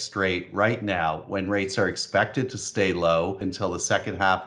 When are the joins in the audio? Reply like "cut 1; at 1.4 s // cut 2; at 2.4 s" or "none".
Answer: cut 1; at 3.5 s